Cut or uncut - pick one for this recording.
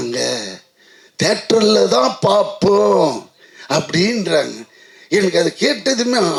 uncut